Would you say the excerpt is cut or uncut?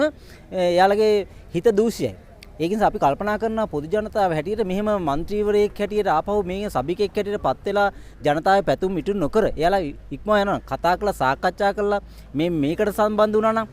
uncut